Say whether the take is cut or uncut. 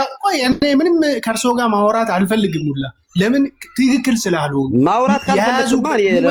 uncut